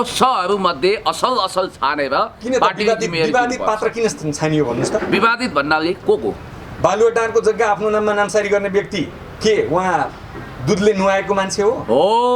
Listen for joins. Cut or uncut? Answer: uncut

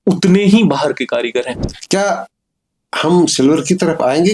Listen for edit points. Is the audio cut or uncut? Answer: cut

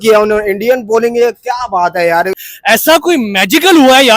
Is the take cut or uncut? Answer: cut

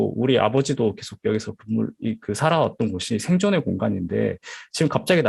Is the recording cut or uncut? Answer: uncut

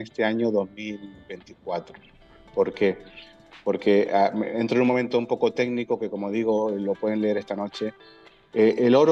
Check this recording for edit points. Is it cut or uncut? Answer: uncut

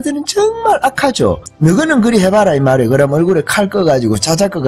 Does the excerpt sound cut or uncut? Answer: cut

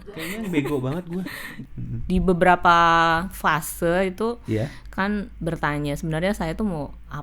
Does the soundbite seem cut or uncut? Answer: cut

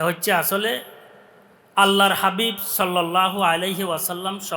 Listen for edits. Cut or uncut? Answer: uncut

